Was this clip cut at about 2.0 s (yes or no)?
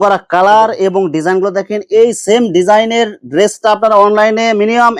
no